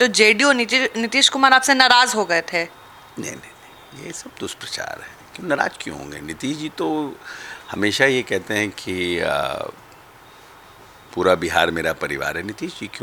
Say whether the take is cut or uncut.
uncut